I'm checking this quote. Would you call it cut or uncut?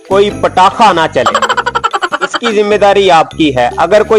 uncut